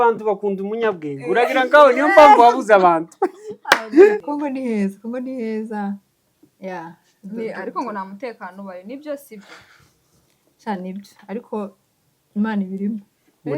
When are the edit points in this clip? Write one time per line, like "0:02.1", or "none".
0:04.2